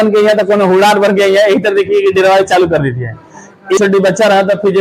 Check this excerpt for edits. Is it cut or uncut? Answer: cut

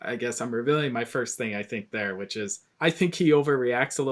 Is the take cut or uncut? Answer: cut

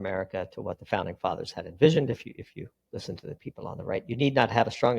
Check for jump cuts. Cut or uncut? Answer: cut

